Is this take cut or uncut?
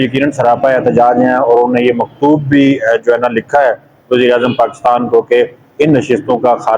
uncut